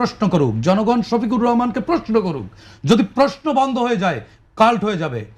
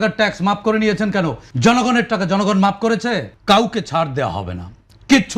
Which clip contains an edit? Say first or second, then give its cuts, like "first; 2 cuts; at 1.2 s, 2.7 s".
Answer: second; 2 cuts; at 1.4 s, 3.3 s